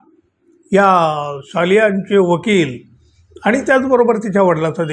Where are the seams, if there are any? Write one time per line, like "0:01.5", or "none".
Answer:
none

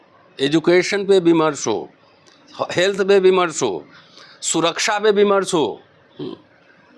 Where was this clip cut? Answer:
none

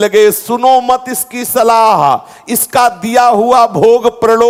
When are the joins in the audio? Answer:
none

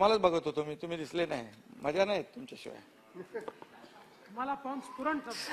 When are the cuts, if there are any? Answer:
none

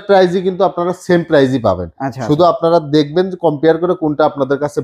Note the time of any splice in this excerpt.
none

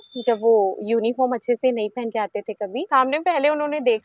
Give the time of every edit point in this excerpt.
0:02.9

